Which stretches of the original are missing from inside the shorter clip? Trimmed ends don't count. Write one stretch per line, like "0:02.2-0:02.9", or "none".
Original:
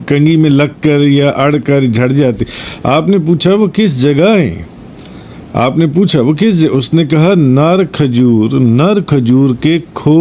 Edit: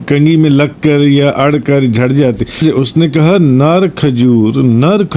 0:02.6-0:06.6